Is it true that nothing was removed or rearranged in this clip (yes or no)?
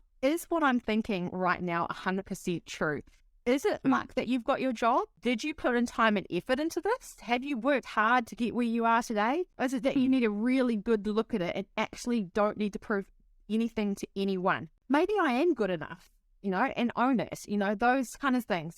no